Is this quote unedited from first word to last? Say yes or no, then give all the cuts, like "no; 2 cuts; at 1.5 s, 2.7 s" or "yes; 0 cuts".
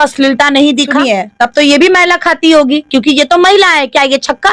no; 1 cut; at 1.0 s